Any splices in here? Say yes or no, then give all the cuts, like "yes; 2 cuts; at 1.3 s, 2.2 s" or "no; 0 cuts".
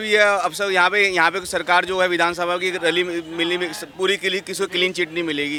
no; 0 cuts